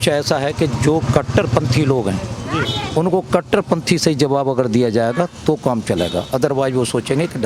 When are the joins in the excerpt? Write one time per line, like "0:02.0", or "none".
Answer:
none